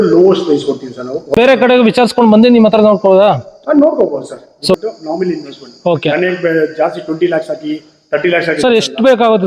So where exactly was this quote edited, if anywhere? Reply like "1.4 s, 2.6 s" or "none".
1.4 s, 4.7 s